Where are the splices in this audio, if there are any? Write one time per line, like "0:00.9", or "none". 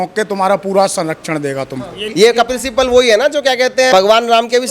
0:02.0
0:03.9